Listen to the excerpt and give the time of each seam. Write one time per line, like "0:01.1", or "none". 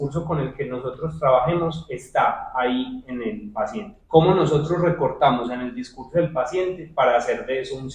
none